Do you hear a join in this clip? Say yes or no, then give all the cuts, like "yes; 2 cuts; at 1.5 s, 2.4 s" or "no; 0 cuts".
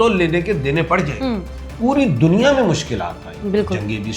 yes; 1 cut; at 1.6 s